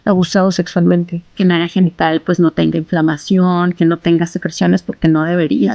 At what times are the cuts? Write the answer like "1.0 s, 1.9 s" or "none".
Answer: 1.3 s